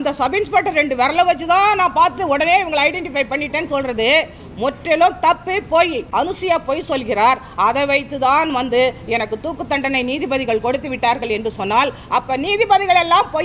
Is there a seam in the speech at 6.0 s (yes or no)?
yes